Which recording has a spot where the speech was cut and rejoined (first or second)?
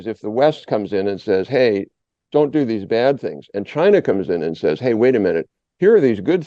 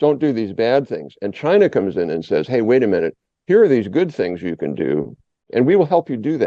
second